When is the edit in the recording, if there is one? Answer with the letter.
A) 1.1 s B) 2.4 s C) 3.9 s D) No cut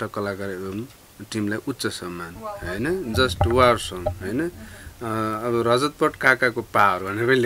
D